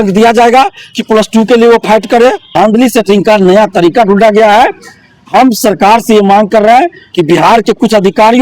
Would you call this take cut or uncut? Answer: cut